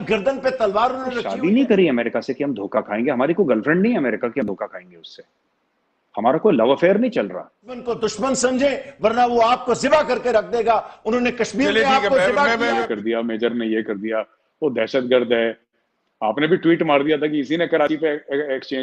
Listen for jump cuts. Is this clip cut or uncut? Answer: cut